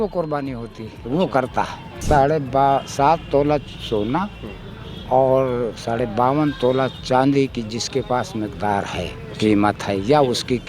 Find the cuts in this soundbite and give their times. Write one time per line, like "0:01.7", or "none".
0:01.9

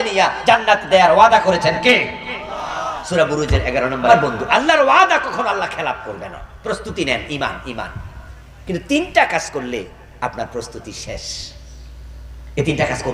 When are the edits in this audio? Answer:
0:04.1

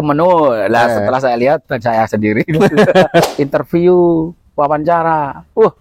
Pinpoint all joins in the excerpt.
0:03.3

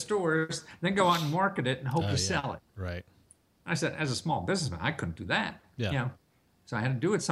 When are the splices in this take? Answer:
none

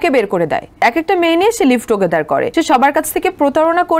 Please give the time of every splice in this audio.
0:00.8
0:02.5

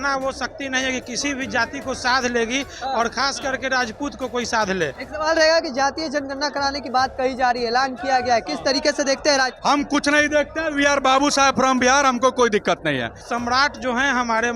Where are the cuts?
0:05.0
0:13.2

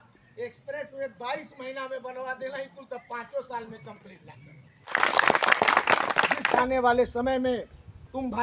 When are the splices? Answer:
0:04.8
0:06.6

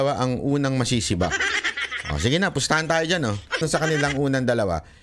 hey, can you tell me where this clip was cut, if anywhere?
0:03.6

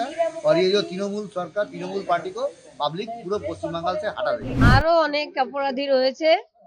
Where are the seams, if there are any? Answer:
0:04.5

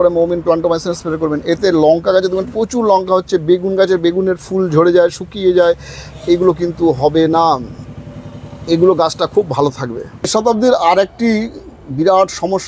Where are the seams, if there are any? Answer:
0:10.3

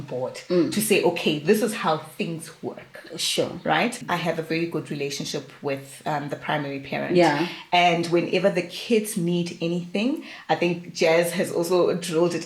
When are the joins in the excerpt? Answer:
0:04.0

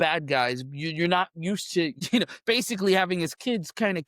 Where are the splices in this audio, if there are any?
0:02.0

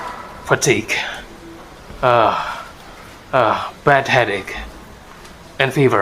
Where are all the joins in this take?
none

